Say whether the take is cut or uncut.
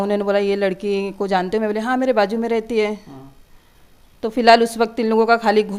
uncut